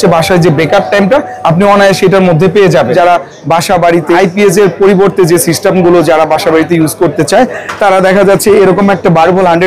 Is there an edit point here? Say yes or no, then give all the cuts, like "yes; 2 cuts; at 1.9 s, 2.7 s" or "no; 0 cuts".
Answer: yes; 2 cuts; at 2.9 s, 4.2 s